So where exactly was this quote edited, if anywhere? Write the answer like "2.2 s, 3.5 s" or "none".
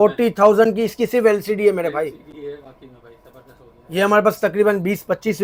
none